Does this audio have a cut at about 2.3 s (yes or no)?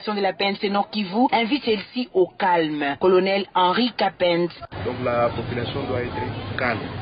yes